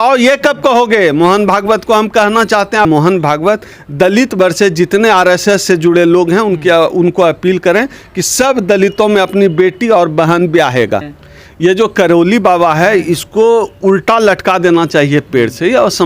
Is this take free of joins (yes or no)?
no